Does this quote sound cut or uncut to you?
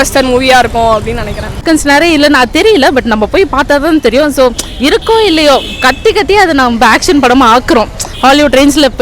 cut